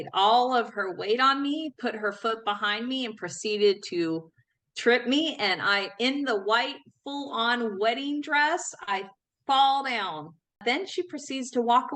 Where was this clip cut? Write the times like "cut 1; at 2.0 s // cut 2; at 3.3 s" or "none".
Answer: cut 1; at 10.6 s